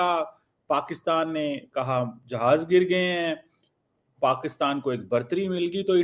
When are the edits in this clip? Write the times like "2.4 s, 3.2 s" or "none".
none

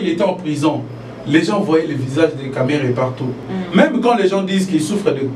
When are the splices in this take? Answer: 3.5 s

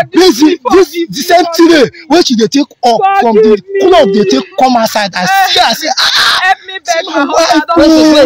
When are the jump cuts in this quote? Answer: none

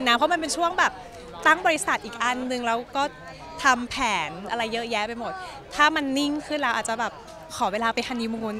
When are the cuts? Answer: none

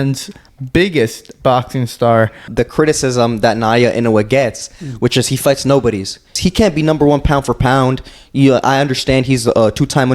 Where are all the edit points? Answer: 2.4 s, 6.3 s

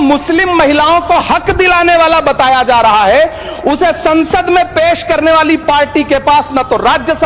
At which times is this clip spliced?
none

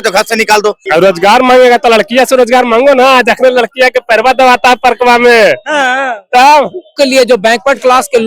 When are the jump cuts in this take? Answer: 0.8 s, 6.9 s

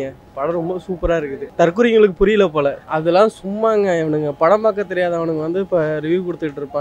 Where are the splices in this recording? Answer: 1.4 s, 2.9 s

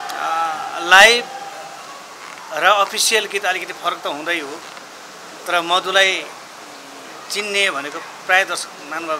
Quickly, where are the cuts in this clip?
none

